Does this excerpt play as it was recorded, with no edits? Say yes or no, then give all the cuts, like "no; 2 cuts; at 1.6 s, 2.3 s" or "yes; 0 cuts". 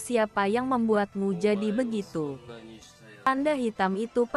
no; 1 cut; at 3.3 s